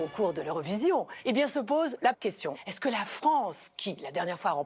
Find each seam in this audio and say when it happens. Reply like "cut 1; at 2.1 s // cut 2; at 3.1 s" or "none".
cut 1; at 1.1 s // cut 2; at 2.3 s